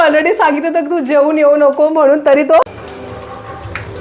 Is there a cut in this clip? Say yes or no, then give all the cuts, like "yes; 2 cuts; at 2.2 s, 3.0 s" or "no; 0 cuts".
yes; 1 cut; at 2.7 s